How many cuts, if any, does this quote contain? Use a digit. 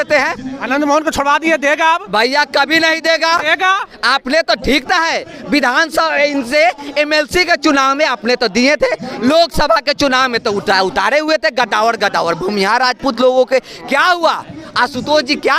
0